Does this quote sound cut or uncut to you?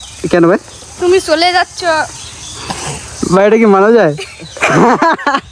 uncut